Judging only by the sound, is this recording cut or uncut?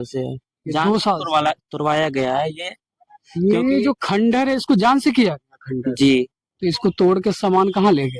cut